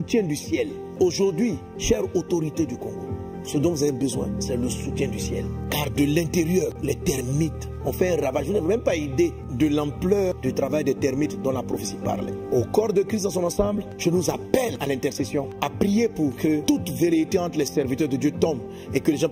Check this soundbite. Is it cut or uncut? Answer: uncut